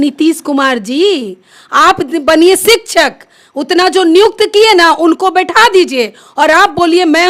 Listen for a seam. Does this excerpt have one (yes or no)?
no